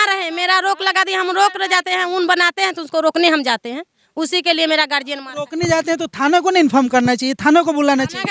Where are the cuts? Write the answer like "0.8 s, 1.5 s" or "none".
none